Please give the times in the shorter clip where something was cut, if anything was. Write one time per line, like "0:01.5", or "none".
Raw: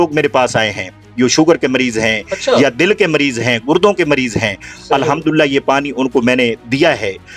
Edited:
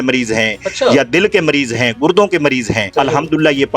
0:02.8